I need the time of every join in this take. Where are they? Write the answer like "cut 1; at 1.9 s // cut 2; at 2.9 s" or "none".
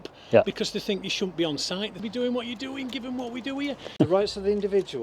cut 1; at 1.9 s // cut 2; at 3.9 s